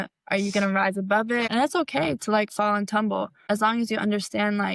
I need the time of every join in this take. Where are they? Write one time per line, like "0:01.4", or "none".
0:01.5
0:03.3